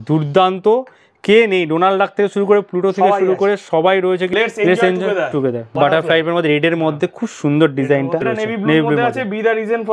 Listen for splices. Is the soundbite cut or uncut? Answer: cut